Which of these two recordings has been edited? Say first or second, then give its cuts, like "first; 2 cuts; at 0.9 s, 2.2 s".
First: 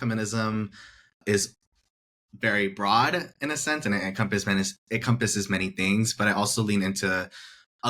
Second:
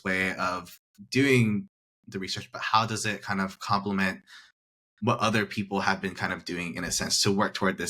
first; 1 cut; at 1.2 s